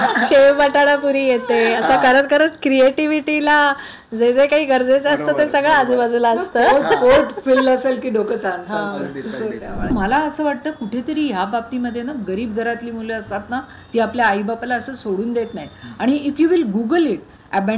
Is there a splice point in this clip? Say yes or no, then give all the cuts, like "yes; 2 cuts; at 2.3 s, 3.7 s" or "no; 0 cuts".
yes; 1 cut; at 9.9 s